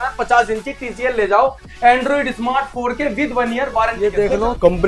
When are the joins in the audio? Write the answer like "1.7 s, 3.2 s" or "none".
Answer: 4.0 s